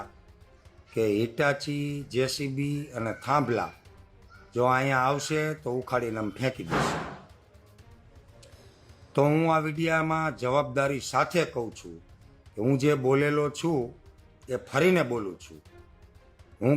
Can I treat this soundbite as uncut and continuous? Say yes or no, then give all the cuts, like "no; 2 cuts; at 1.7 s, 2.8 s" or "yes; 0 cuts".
yes; 0 cuts